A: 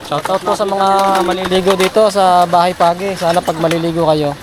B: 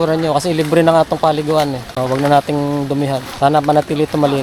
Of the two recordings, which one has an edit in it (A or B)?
B